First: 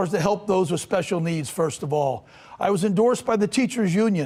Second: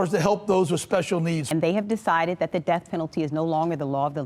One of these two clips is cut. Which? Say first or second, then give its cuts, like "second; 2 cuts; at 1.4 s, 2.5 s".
second; 1 cut; at 1.5 s